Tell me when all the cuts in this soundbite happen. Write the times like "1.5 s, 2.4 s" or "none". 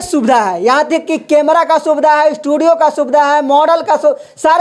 none

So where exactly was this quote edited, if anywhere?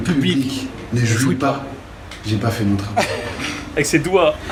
none

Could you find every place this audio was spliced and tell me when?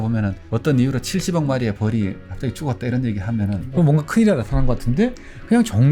3.6 s

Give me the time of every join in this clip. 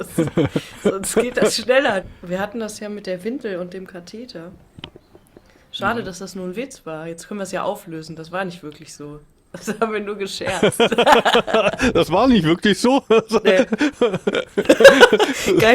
2.0 s

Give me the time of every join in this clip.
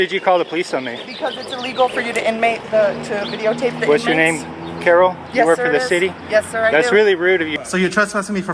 7.6 s

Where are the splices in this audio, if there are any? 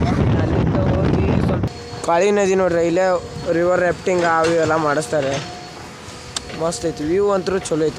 1.7 s

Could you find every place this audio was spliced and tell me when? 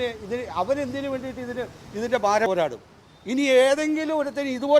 2.5 s

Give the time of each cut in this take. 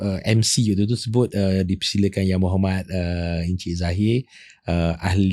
none

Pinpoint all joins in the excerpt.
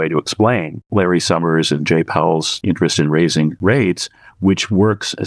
0.8 s, 2.5 s, 3.6 s

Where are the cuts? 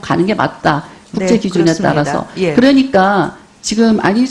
2.3 s

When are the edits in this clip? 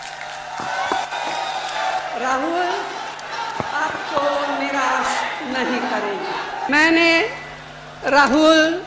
6.7 s

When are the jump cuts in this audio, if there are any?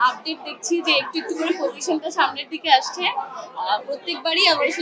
none

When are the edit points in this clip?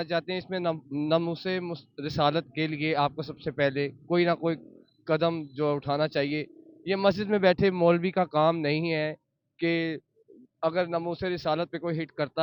none

